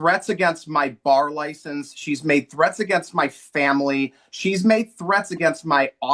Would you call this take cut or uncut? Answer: uncut